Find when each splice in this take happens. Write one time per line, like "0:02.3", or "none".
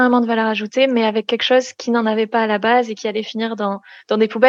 none